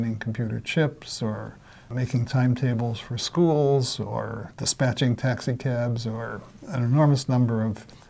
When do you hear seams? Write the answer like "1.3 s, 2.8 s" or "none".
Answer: 1.8 s